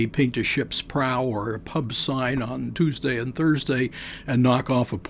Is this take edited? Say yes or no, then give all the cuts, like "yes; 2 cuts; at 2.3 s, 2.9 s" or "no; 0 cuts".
no; 0 cuts